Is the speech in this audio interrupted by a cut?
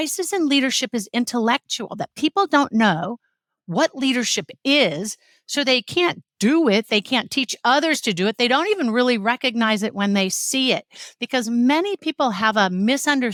no; 0 cuts

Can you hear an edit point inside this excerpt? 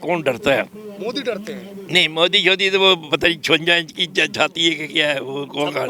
no; 0 cuts

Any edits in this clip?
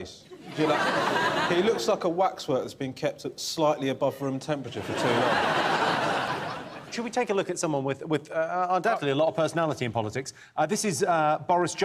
no; 0 cuts

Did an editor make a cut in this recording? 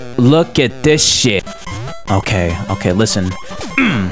yes; 1 cut; at 1.4 s

